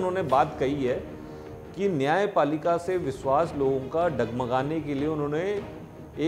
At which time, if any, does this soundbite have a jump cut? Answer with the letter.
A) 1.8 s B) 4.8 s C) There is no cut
C